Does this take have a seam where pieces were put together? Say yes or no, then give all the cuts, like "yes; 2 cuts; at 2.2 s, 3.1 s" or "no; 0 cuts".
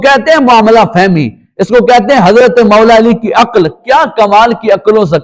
no; 0 cuts